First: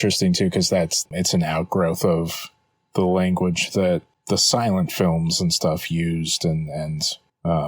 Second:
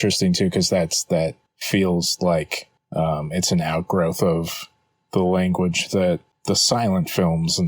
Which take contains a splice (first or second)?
first